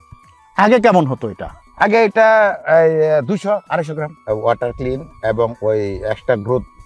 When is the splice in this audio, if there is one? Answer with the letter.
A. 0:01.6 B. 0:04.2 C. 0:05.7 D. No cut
B